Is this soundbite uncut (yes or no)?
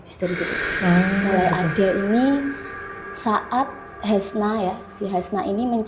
yes